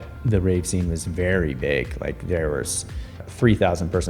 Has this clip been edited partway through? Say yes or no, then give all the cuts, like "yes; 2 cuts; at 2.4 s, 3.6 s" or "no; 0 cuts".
yes; 1 cut; at 3.1 s